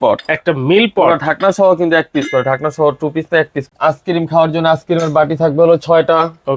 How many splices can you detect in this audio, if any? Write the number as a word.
one